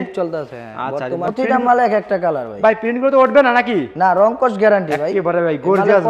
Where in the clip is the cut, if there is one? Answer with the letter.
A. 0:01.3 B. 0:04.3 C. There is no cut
A